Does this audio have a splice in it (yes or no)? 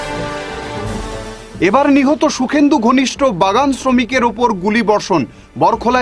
yes